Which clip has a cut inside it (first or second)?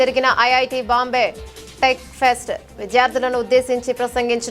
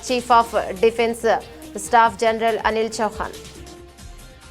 second